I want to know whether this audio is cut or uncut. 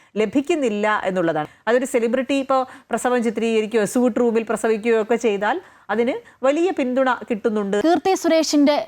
cut